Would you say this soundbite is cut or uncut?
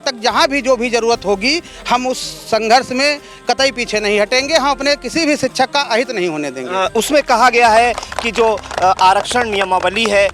uncut